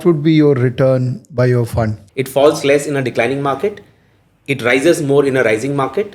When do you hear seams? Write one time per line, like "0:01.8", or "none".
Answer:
0:02.0